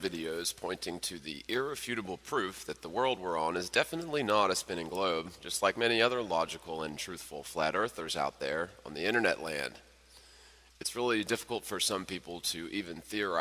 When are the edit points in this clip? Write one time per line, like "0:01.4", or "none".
0:08.6